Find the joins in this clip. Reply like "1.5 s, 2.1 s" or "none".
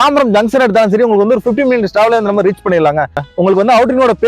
3.2 s